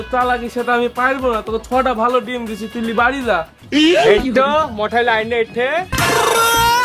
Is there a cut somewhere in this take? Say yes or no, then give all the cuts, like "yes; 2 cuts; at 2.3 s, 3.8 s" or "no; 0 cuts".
no; 0 cuts